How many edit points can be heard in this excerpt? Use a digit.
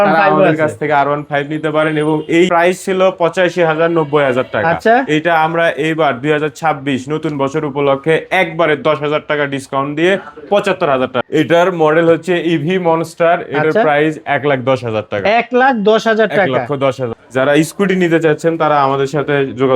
3